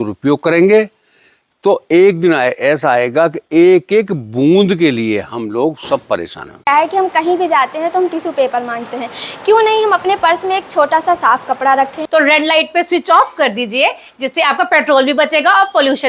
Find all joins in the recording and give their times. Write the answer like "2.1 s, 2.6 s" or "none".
6.7 s, 12.0 s